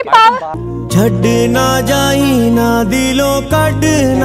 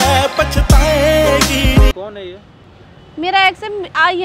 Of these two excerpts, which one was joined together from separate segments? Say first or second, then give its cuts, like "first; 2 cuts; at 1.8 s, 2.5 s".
second; 1 cut; at 1.9 s